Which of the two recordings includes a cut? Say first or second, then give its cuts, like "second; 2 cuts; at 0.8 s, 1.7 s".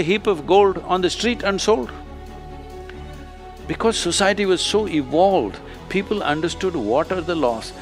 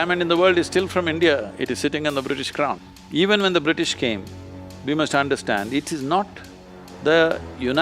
second; 1 cut; at 2.8 s